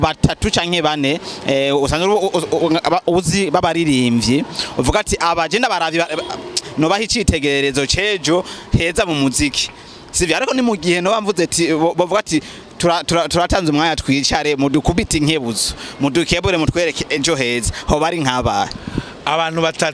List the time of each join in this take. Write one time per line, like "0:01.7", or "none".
none